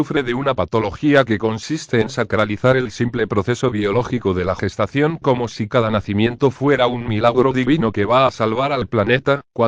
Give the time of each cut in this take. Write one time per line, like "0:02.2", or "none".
0:01.3